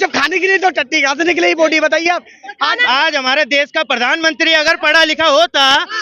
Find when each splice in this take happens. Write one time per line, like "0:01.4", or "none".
0:02.8